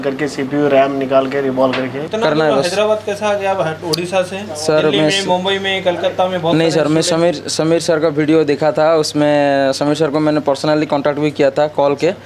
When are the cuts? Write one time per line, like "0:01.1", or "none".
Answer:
0:02.0